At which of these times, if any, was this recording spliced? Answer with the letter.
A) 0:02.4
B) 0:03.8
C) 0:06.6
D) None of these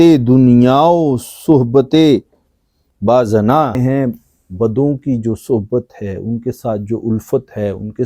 B